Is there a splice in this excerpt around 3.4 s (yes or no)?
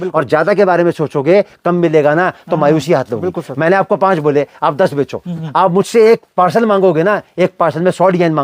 no